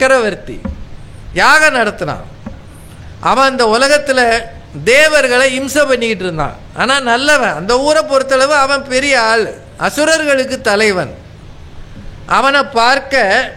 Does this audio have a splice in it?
no; 0 cuts

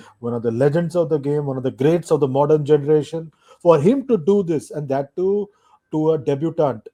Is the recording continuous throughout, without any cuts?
yes; 0 cuts

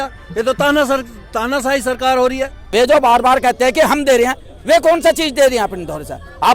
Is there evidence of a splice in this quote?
yes; 1 cut; at 2.5 s

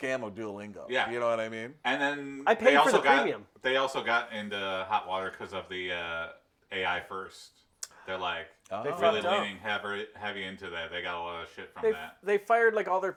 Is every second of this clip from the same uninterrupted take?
yes; 0 cuts

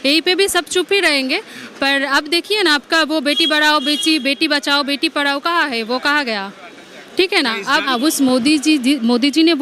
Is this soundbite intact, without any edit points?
no; 1 cut; at 7.9 s

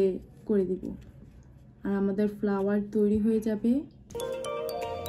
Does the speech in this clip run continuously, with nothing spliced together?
yes; 0 cuts

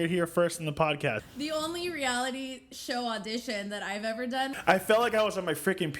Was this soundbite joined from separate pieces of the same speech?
yes; 2 cuts; at 1.2 s, 4.5 s

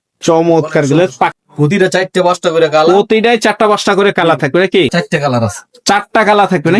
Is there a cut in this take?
yes; 2 cuts; at 1.3 s, 4.9 s

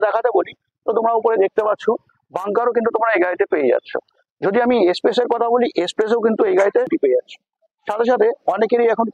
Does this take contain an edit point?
yes; 1 cut; at 6.9 s

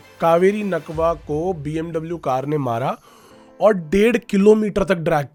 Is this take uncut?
yes; 0 cuts

